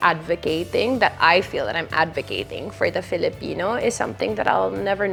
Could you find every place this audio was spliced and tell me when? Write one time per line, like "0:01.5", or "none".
none